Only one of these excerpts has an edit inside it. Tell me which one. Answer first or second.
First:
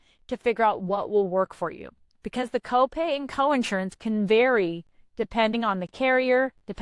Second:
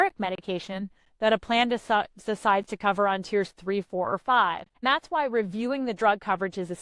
second